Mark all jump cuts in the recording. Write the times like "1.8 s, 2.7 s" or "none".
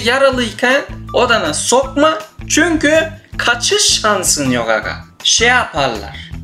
none